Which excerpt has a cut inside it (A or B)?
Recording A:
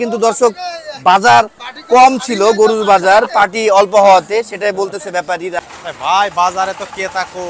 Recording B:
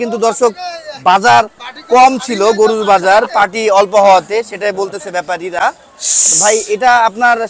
A